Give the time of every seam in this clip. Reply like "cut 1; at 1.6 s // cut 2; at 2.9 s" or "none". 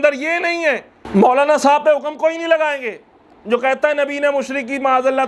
cut 1; at 0.9 s